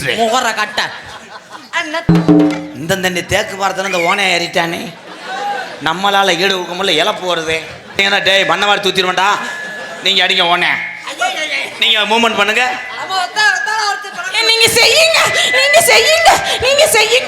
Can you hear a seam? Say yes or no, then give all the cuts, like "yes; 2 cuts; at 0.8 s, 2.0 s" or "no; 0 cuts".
yes; 2 cuts; at 2.1 s, 7.9 s